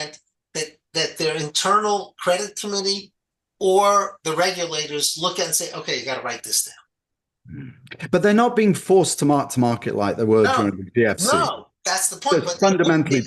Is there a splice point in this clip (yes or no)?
no